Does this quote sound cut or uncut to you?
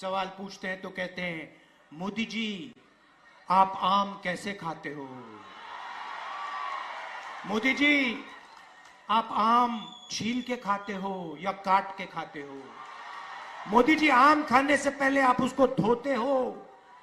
uncut